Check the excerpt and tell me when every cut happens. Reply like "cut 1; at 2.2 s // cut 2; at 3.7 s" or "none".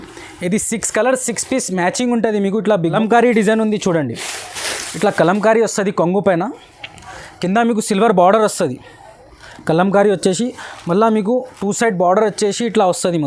cut 1; at 2.9 s